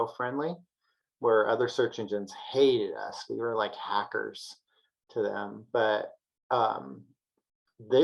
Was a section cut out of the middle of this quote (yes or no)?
no